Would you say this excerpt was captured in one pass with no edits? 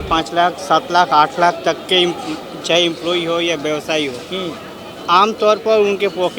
yes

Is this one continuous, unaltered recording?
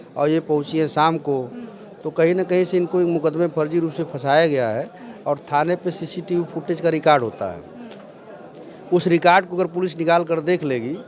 yes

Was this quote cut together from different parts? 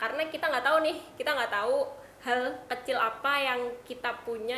no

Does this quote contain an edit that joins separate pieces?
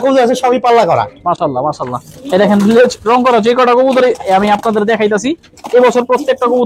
no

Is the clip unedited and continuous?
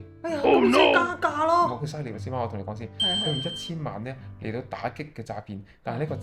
no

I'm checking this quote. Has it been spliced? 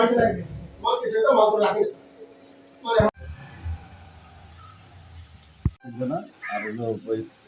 yes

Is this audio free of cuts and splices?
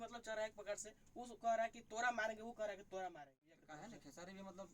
no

